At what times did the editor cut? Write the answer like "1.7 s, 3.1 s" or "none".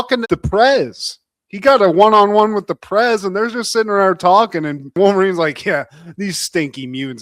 none